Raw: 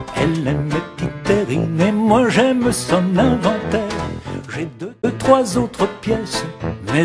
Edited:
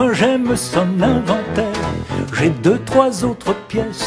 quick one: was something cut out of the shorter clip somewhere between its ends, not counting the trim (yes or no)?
yes